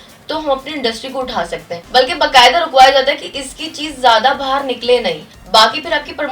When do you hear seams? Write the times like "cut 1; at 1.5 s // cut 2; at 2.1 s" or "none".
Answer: cut 1; at 1.8 s // cut 2; at 5.3 s